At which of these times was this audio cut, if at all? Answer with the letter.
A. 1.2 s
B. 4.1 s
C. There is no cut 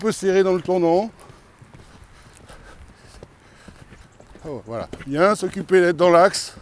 B